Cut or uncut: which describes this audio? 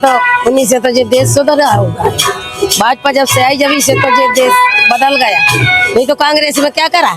uncut